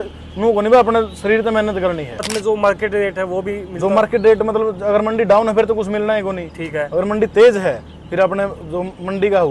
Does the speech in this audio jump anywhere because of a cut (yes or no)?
yes